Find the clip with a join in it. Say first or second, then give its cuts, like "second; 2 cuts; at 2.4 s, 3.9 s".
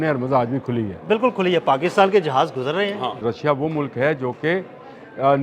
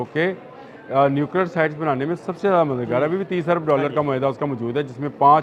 first; 1 cut; at 3.2 s